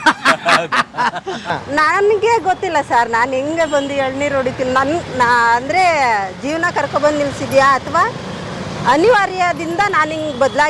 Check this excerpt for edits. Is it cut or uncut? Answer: cut